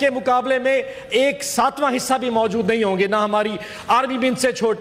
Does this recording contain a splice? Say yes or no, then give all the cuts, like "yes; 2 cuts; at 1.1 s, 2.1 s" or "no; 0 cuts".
no; 0 cuts